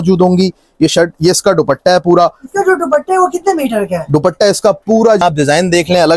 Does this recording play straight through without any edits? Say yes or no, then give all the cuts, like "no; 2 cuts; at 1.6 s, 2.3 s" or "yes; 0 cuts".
no; 1 cut; at 5.2 s